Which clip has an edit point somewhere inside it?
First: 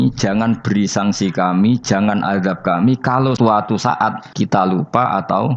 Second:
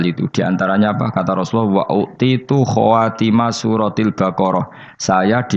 first; 2 cuts; at 3.4 s, 4.2 s

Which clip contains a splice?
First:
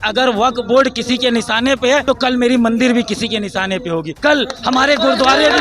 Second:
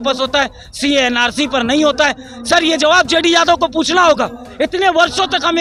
first; 2 cuts; at 2.0 s, 4.1 s

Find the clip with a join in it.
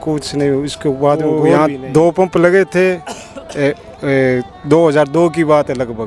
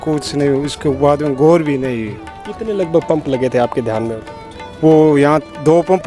first; 1 cut; at 1.6 s

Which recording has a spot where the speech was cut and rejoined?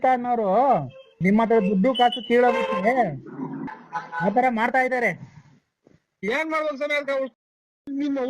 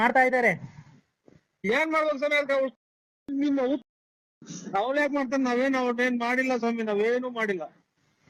first; 2 cuts; at 1.1 s, 3.7 s

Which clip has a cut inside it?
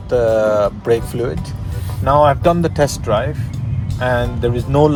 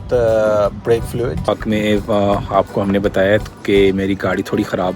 second; 1 cut; at 1.5 s

